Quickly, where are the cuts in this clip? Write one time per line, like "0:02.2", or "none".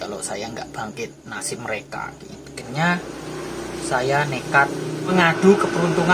0:02.6
0:05.1